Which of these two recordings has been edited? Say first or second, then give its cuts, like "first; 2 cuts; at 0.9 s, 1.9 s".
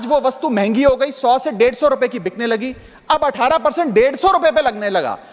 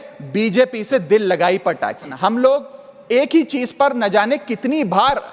second; 1 cut; at 2.0 s